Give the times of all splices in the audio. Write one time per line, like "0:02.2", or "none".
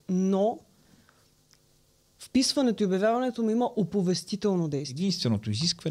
0:04.9